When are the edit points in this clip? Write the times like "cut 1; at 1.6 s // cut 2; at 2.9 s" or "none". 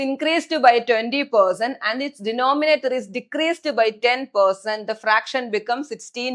none